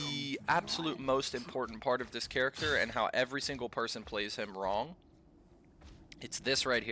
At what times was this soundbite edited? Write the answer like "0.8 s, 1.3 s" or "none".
none